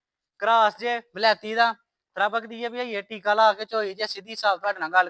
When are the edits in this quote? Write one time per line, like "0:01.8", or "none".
none